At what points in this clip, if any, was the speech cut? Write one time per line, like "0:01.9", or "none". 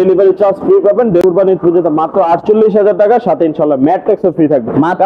0:01.2